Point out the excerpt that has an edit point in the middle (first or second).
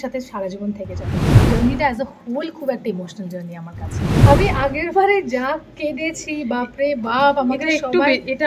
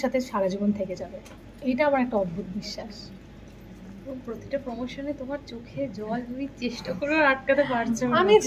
first